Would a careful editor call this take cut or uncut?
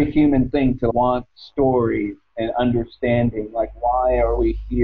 cut